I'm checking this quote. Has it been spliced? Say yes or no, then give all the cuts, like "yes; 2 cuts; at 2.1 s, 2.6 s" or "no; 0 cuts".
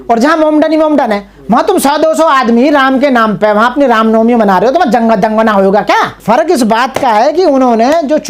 yes; 1 cut; at 6.1 s